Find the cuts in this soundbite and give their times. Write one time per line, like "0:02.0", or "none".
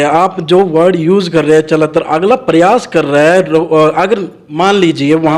none